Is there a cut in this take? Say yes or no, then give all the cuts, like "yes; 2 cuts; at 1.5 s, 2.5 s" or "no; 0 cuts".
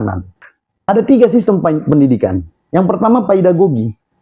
yes; 2 cuts; at 0.8 s, 2.6 s